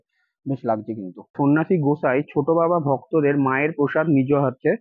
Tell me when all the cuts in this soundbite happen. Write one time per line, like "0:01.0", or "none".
0:01.4